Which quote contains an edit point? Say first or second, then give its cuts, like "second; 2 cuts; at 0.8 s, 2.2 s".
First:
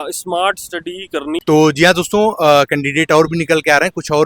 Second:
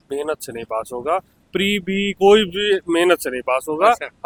first; 1 cut; at 1.4 s